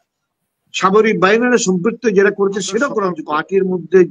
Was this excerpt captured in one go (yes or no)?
no